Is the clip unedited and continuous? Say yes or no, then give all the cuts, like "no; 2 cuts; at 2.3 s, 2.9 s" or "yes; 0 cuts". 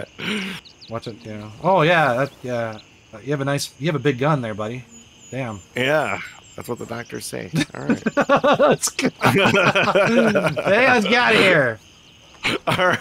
yes; 0 cuts